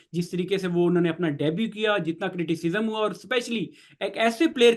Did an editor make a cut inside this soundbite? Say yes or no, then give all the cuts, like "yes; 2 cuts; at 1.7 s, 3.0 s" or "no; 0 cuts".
no; 0 cuts